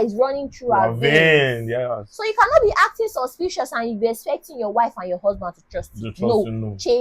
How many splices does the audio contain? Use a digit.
0